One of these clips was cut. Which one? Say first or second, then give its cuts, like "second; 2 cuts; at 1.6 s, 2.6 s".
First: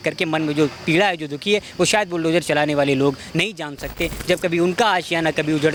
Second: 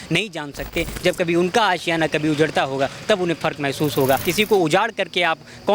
second; 1 cut; at 4.3 s